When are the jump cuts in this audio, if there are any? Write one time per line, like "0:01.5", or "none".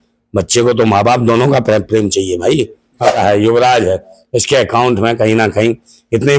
0:03.1